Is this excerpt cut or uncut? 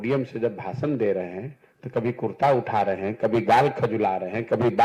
uncut